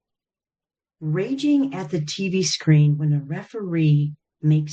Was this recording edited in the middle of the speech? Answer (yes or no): no